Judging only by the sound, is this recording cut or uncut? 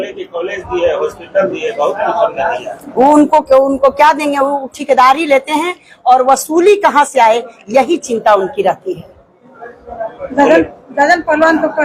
uncut